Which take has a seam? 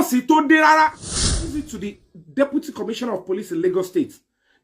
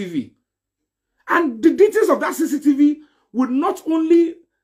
first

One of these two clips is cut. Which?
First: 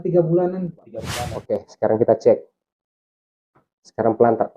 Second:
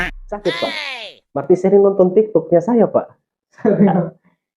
first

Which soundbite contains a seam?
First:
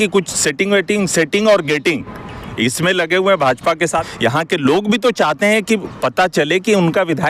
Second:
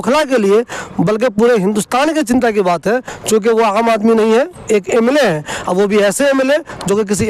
first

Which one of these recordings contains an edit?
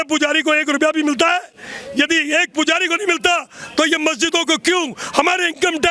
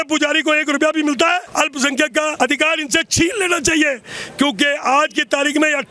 second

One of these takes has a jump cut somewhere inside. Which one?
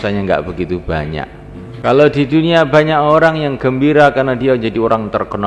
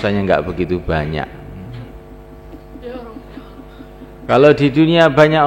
first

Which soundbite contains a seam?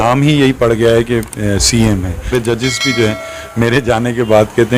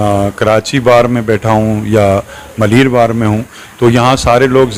first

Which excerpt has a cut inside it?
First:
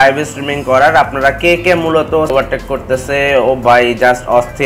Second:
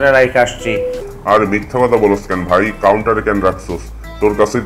first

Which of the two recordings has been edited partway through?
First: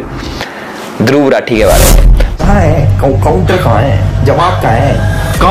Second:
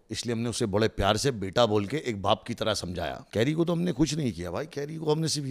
first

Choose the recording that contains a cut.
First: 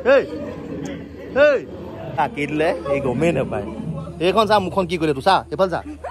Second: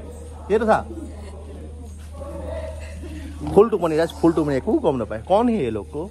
first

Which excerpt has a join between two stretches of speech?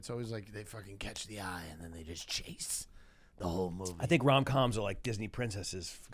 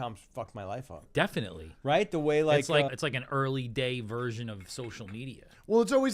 second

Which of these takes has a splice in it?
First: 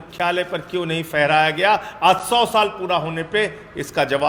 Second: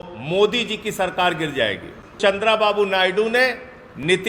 second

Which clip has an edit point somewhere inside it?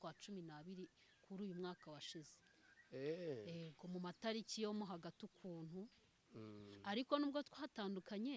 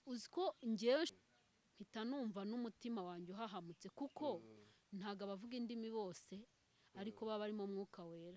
second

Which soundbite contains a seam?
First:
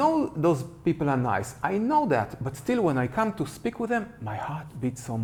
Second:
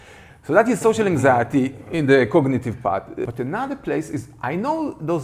second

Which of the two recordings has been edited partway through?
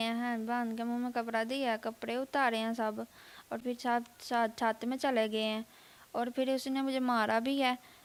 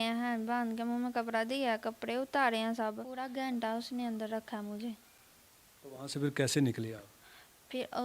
second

